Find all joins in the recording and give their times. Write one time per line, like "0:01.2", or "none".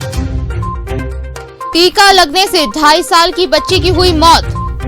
0:01.7